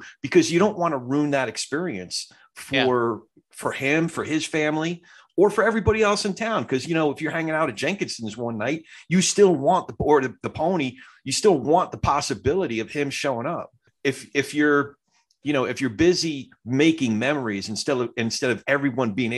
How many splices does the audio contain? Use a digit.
1